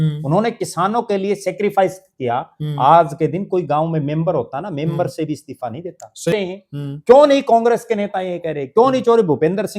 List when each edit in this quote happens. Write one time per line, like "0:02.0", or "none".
0:06.4